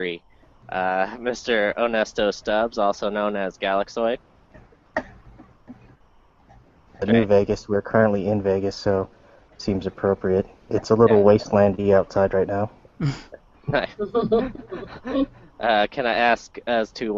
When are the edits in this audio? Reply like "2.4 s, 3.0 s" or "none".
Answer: 9.6 s